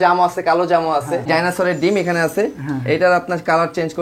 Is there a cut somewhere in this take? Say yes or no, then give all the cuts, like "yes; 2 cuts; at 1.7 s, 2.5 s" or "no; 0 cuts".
yes; 1 cut; at 1.3 s